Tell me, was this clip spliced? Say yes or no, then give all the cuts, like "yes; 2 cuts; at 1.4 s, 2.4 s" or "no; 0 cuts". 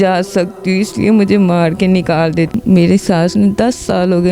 yes; 1 cut; at 2.5 s